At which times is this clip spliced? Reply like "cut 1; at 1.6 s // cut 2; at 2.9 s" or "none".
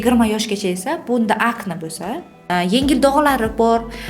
cut 1; at 2.3 s